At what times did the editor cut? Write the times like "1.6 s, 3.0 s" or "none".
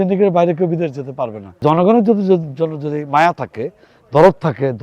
1.6 s